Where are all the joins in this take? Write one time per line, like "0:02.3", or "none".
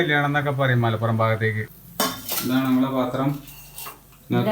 0:01.7